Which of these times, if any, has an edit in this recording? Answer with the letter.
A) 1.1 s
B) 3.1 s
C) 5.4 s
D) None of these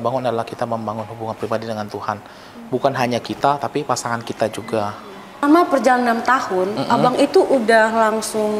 C